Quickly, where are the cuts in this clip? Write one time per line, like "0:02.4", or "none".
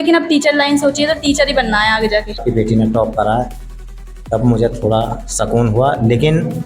0:02.4